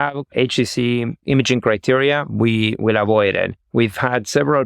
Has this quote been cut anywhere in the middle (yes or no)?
yes